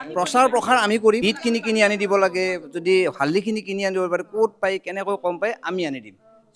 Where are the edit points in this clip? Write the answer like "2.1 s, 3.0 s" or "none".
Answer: 1.2 s